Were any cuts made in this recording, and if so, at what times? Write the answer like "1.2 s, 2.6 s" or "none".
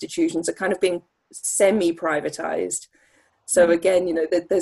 none